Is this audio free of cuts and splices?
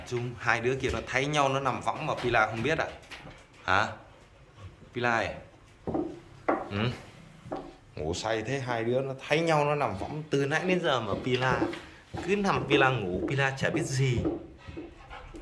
yes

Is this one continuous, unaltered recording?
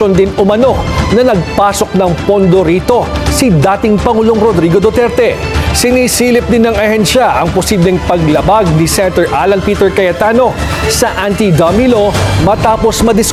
yes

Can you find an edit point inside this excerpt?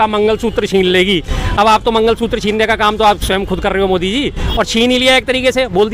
no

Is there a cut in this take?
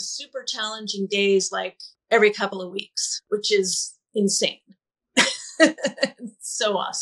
no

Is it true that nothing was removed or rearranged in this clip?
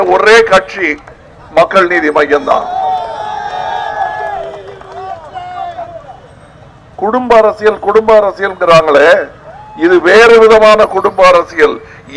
yes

